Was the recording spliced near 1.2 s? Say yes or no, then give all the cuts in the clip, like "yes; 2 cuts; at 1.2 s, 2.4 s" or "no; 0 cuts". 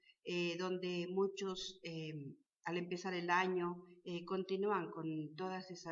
yes; 1 cut; at 1.2 s